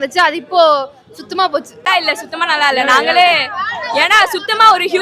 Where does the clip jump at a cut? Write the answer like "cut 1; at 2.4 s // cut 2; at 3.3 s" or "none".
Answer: cut 1; at 1.7 s